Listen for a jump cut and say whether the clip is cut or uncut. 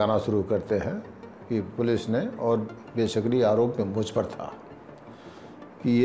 uncut